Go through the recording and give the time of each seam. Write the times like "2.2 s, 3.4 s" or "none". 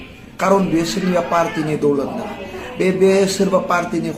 none